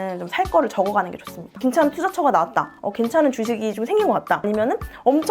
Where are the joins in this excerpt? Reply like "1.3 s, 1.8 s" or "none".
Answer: 1.5 s